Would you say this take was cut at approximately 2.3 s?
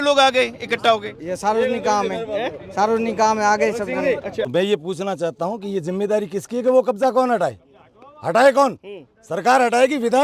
no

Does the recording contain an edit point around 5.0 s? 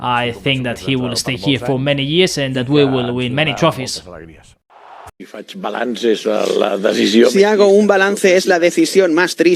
yes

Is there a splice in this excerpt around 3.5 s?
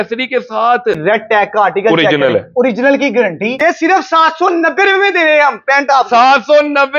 yes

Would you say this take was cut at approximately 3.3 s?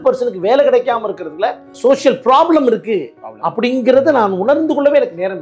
no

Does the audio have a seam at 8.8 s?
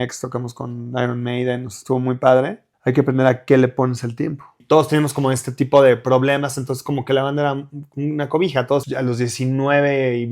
yes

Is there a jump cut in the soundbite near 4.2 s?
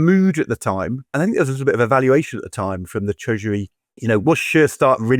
yes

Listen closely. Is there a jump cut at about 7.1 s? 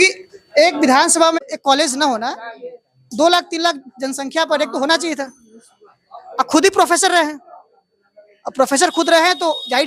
no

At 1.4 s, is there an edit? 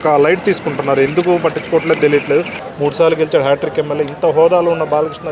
no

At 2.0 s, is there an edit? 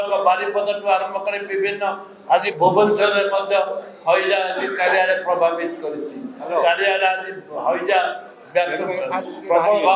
no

